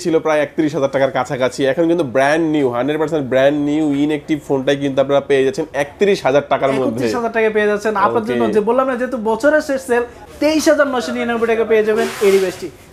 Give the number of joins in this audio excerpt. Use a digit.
1